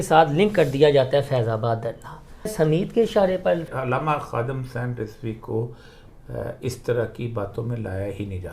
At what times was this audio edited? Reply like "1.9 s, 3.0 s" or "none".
2.5 s, 3.7 s